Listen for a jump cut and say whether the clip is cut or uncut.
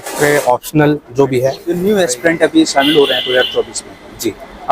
cut